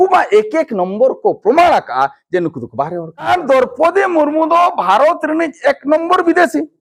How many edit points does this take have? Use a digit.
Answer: 1